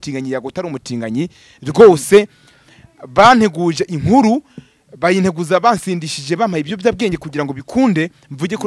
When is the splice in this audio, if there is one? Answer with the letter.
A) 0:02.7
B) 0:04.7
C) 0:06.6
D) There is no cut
D